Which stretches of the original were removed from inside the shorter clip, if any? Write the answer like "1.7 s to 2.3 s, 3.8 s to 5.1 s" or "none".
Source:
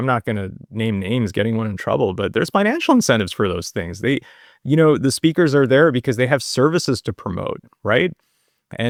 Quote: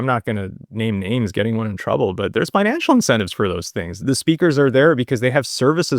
4.0 s to 5.0 s